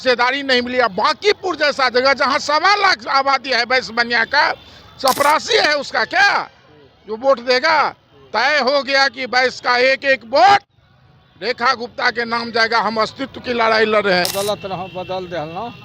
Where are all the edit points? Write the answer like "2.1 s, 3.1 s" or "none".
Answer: 14.3 s